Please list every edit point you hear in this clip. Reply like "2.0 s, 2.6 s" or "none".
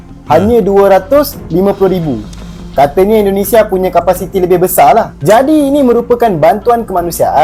none